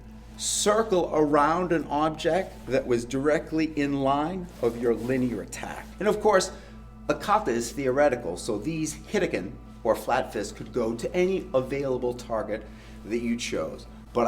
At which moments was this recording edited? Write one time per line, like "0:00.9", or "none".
0:05.8
0:07.1